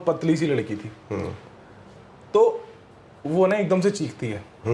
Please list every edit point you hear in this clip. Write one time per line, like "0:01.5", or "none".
none